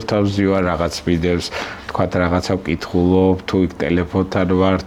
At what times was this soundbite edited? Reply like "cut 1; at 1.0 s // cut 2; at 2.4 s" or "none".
none